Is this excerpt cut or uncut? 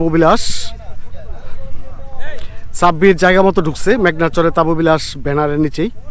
uncut